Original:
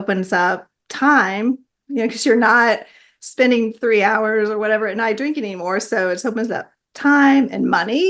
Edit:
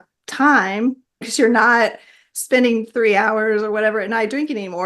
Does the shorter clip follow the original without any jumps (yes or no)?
no